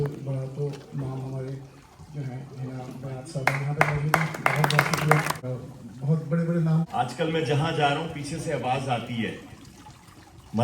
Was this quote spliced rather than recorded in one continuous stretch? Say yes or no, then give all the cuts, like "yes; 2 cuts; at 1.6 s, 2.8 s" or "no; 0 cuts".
yes; 2 cuts; at 5.4 s, 6.9 s